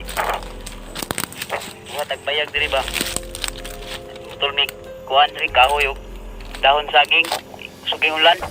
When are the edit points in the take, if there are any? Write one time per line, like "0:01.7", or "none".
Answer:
none